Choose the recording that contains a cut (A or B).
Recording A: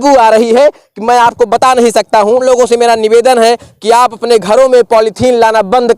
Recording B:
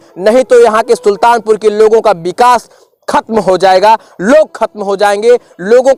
A